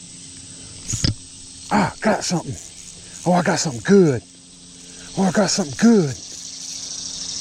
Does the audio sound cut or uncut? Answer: uncut